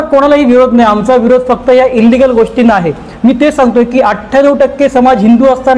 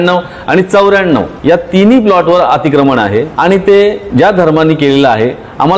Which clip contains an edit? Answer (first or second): second